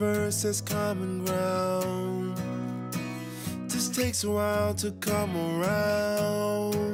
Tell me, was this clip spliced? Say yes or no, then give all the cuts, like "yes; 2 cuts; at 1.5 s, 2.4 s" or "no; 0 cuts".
no; 0 cuts